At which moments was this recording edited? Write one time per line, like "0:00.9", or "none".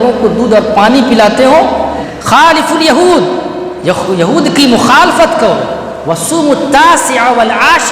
0:02.0